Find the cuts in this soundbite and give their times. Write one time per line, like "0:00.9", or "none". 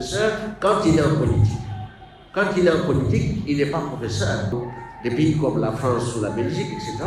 0:04.5